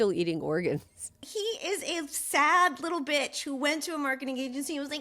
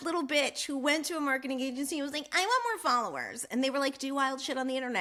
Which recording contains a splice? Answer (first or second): first